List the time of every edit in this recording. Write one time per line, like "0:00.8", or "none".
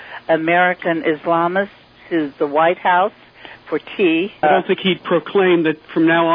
0:04.4